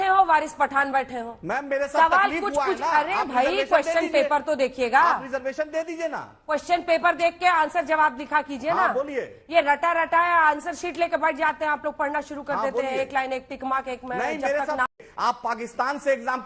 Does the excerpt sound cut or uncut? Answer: cut